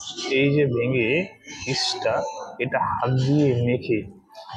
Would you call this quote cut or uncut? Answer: uncut